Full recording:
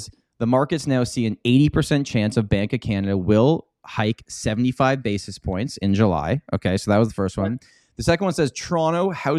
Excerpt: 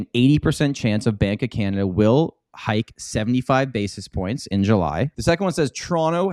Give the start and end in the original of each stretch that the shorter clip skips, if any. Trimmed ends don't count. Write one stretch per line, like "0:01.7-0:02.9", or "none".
0:06.4-0:07.9

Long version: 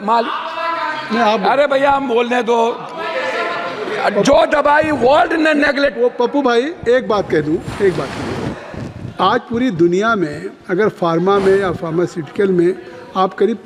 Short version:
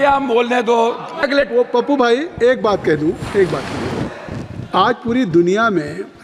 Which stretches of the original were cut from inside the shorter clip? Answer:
0:03.0-0:05.7

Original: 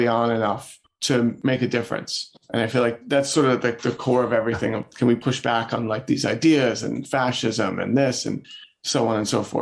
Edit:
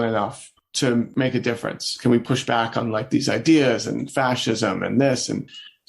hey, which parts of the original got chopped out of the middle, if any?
0:02.2-0:04.9

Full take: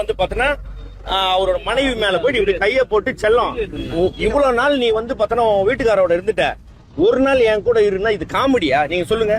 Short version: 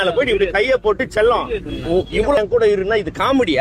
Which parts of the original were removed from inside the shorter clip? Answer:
0:04.4-0:07.5

